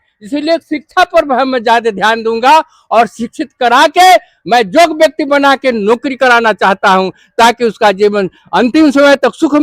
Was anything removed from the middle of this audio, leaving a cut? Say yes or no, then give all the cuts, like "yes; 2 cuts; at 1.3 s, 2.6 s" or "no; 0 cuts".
no; 0 cuts